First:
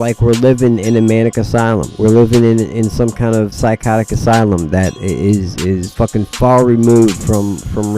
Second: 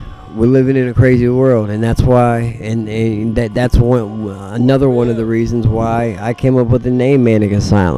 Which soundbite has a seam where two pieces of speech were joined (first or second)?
first